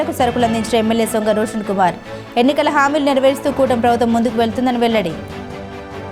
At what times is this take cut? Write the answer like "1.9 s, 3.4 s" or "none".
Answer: 5.2 s

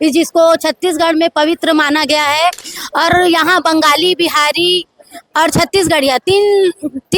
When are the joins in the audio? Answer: 2.7 s

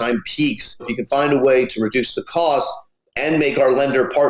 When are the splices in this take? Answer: 1.0 s

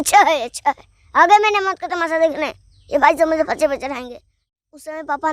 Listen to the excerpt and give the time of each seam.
4.4 s

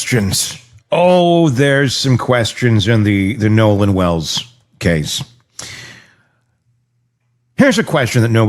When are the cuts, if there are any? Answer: none

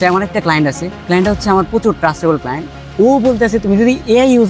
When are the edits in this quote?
0.9 s, 2.7 s

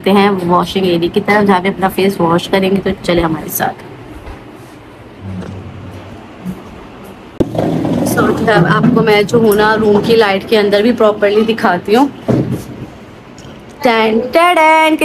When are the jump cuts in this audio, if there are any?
7.4 s

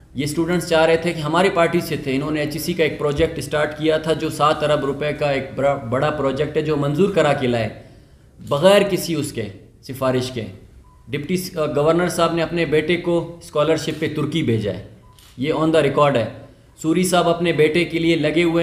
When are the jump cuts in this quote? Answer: none

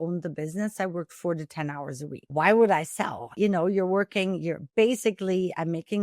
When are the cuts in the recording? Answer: 2.2 s, 3.3 s

